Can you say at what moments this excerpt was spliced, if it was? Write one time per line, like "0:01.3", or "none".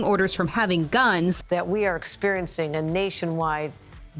0:01.4